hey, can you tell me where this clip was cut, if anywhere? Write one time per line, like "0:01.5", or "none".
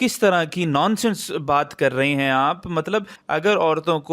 0:03.2